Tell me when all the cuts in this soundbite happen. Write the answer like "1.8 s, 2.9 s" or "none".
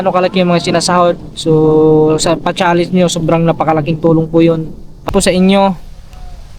5.0 s